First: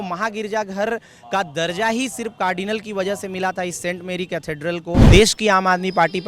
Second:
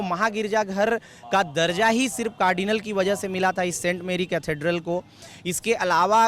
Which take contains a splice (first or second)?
first